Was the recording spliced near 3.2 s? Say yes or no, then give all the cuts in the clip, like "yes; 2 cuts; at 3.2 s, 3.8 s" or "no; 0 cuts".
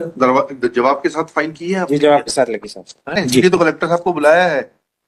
yes; 1 cut; at 3.2 s